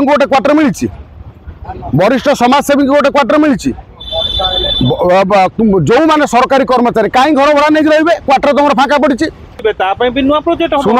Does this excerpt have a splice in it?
yes; 1 cut; at 9.6 s

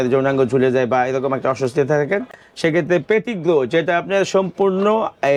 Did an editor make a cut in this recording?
no; 0 cuts

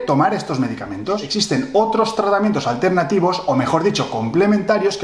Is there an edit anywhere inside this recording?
yes; 1 cut; at 1.3 s

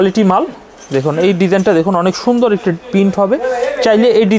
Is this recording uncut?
yes; 0 cuts

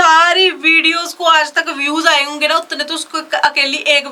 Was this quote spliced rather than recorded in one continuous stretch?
no; 0 cuts

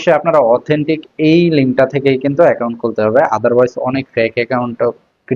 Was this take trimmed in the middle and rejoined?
no; 0 cuts

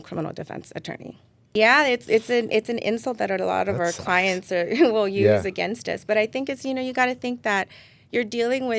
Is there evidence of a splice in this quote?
yes; 1 cut; at 1.5 s

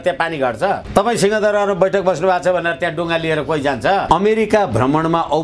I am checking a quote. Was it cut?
yes; 2 cuts; at 0.8 s, 4.0 s

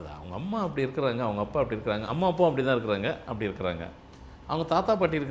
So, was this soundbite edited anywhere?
no; 0 cuts

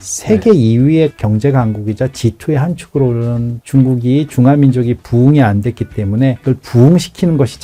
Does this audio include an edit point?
no; 0 cuts

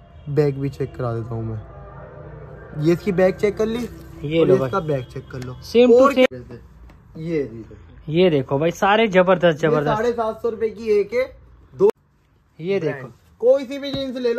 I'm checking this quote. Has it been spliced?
yes; 2 cuts; at 6.3 s, 11.9 s

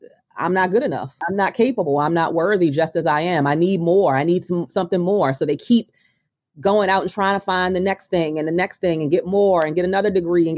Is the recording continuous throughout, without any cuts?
no; 1 cut; at 1.2 s

